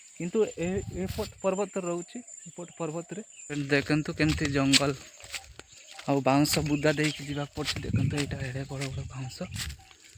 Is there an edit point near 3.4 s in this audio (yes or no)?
yes